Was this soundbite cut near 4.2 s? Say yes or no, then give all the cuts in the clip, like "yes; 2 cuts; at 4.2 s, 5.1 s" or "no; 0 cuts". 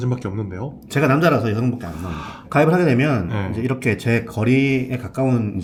no; 0 cuts